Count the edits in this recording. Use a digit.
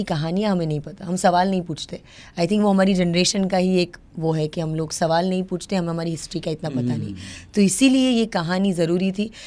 0